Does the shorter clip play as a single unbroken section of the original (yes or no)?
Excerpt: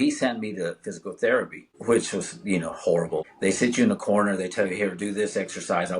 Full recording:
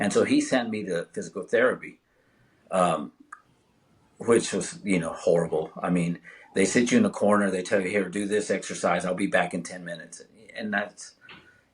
no